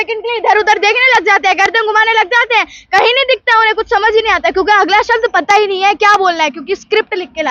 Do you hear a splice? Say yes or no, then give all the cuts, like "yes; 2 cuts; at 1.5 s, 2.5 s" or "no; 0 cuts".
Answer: no; 0 cuts